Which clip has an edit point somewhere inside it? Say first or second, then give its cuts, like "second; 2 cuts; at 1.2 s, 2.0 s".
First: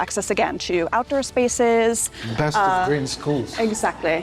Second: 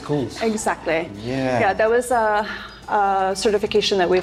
first; 1 cut; at 2.2 s